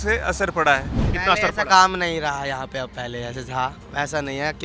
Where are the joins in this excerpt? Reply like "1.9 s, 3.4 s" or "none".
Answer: 1.1 s